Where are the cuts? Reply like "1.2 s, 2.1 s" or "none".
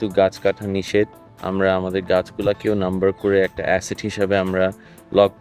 none